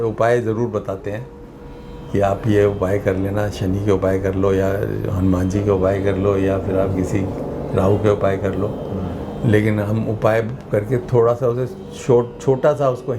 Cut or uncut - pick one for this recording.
uncut